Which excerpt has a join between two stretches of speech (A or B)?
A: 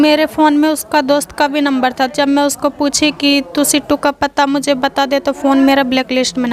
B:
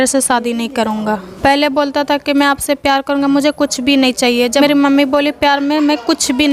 B